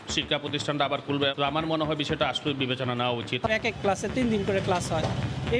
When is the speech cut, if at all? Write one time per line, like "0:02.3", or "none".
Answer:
0:01.3
0:03.5